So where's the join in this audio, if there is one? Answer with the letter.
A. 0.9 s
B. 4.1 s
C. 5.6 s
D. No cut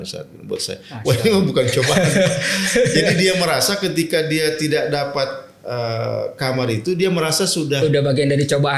D